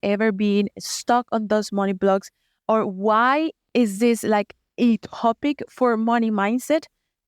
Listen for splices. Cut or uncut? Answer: cut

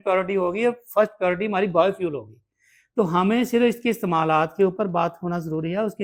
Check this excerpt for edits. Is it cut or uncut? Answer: uncut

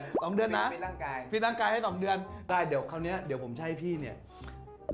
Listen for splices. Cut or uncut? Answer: cut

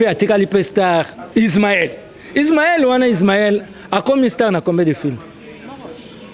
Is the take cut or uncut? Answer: cut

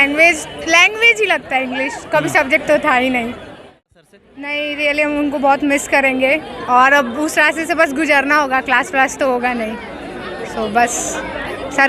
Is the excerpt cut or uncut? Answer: cut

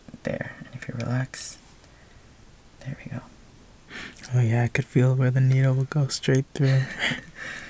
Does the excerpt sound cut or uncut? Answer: uncut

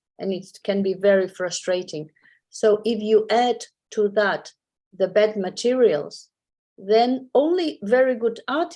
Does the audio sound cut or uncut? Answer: uncut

